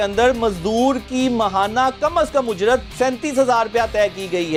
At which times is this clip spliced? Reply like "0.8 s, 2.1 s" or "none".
none